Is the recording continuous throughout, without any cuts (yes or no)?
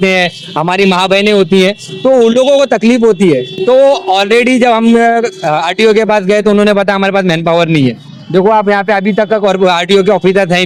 yes